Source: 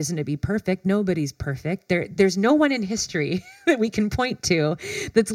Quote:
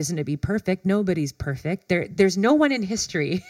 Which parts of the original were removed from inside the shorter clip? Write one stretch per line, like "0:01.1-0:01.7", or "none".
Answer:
none